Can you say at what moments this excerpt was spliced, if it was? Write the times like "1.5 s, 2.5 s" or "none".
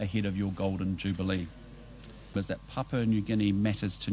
2.3 s